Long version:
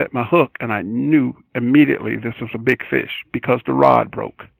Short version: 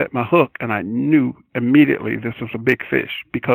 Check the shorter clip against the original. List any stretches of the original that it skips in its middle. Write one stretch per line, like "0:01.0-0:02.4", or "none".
none